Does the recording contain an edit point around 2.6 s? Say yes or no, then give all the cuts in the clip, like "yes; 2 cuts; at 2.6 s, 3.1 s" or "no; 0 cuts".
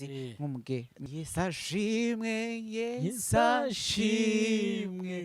no; 1 cut; at 1.0 s